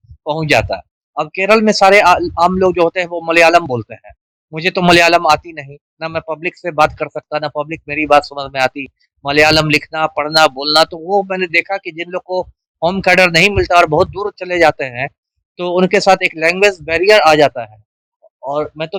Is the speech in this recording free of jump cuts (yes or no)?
yes